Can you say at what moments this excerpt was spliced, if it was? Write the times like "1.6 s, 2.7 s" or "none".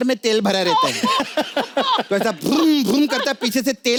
none